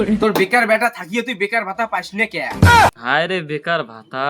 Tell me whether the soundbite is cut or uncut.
cut